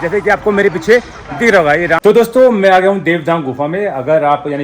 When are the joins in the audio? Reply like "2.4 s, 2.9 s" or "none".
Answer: 2.0 s